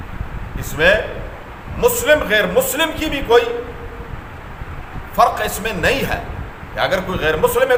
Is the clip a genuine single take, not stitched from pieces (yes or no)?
yes